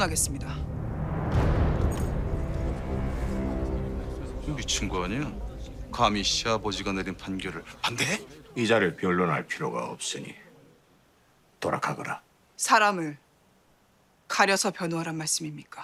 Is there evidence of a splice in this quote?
no; 0 cuts

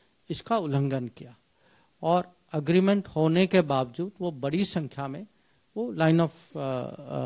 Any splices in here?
no; 0 cuts

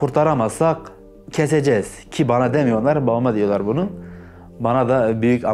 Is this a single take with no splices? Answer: no; 1 cut; at 1.1 s

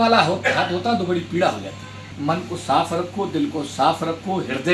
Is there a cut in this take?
yes; 1 cut; at 2.0 s

